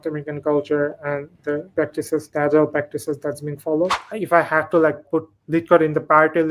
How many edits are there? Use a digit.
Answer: 3